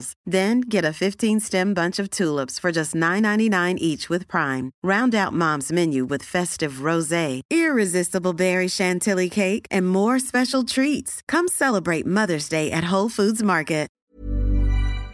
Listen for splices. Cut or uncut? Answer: cut